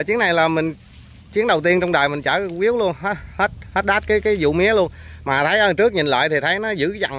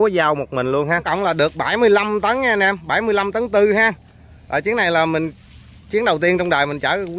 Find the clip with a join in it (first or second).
second